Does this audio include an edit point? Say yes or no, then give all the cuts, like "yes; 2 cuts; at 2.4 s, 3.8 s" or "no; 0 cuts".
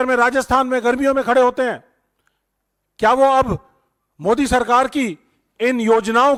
no; 0 cuts